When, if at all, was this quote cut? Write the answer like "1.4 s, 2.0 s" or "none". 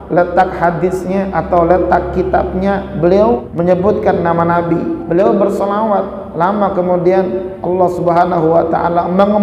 3.5 s, 5.0 s